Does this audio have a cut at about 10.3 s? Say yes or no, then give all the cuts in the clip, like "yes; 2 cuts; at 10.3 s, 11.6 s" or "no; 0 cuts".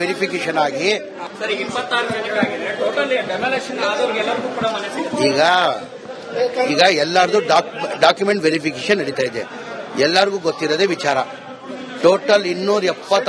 no; 1 cut; at 3.7 s